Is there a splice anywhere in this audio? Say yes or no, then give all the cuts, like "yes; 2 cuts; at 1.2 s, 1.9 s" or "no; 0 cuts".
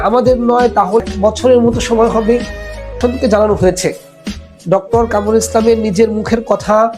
yes; 2 cuts; at 1.0 s, 3.0 s